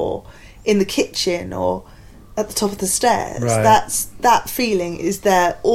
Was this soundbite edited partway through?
no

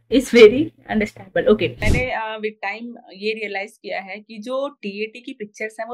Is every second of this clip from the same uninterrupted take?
no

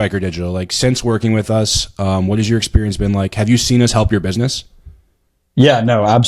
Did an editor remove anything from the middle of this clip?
no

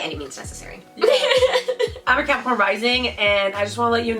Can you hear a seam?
yes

